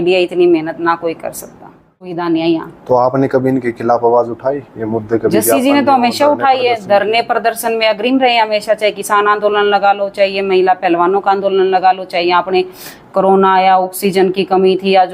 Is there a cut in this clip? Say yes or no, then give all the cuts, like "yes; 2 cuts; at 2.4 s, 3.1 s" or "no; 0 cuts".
yes; 1 cut; at 2.1 s